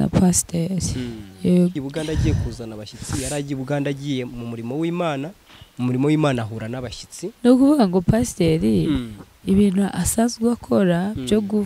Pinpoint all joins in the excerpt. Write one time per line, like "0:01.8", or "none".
0:01.7

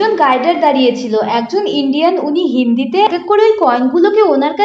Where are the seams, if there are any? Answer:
0:03.1

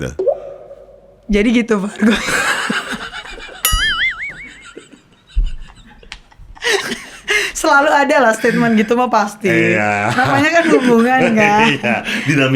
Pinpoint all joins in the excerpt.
none

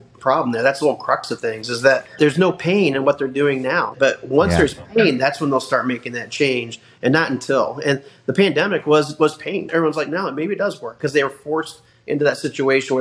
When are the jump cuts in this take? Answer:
0:02.2
0:03.9
0:09.7

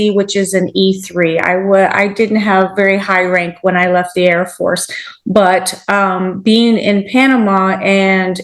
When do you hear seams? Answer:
none

